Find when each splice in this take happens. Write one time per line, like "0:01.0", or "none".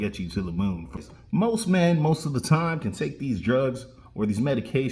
0:01.0